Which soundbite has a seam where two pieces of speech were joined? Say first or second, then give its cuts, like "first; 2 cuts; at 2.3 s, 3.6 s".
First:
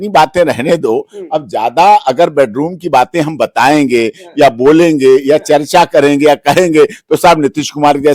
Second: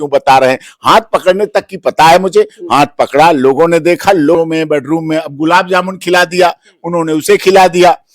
second; 1 cut; at 4.4 s